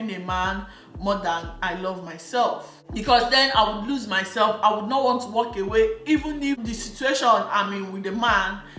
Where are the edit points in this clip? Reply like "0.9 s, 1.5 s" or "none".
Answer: none